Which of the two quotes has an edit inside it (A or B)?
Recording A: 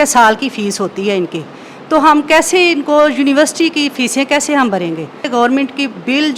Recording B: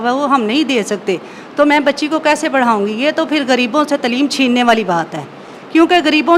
A